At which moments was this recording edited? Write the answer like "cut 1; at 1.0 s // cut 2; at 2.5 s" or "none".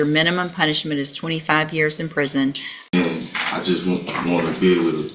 cut 1; at 2.7 s